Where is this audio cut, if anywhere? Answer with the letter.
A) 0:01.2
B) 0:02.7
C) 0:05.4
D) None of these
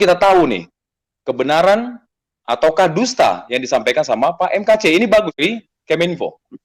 C